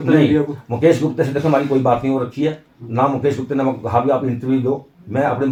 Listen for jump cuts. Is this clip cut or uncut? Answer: uncut